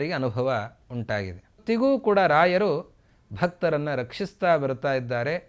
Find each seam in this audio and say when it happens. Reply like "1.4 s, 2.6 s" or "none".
1.6 s